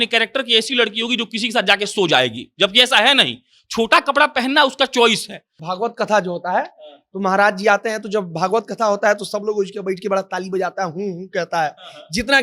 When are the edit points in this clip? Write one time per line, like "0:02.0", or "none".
0:05.6